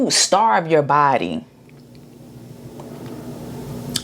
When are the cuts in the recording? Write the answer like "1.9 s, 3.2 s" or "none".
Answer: none